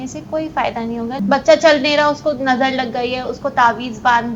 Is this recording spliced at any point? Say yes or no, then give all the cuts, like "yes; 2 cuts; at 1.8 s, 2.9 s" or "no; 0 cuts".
yes; 1 cut; at 1.2 s